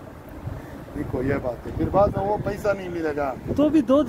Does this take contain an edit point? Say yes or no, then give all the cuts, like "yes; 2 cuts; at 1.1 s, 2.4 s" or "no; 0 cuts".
no; 0 cuts